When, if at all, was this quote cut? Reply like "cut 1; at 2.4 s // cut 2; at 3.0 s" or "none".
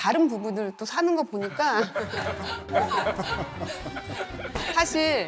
cut 1; at 2.7 s